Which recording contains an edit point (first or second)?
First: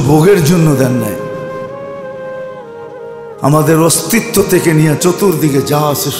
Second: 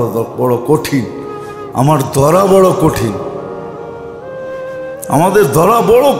first